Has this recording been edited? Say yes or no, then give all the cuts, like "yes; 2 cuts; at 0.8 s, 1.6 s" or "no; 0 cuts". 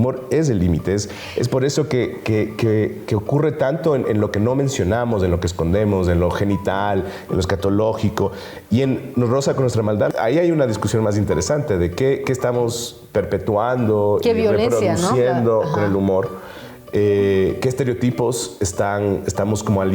yes; 1 cut; at 10.1 s